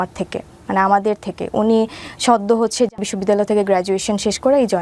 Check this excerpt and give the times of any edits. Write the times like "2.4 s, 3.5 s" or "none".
3.0 s